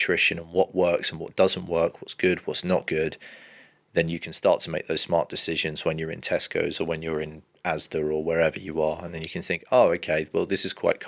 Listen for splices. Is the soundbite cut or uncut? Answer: uncut